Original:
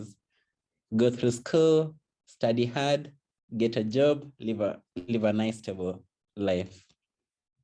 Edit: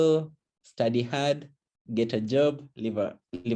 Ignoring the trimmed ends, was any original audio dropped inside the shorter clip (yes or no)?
no